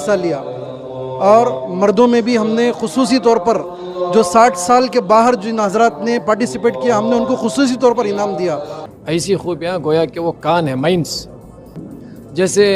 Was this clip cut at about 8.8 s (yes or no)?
yes